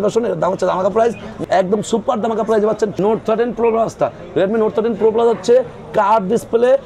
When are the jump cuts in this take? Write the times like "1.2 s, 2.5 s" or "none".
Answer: 1.3 s, 2.9 s